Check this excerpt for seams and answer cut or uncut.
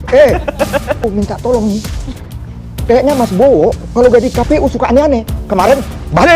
cut